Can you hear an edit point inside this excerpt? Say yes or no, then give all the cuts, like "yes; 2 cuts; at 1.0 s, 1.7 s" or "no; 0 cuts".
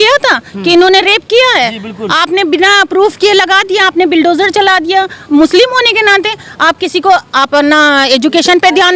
no; 0 cuts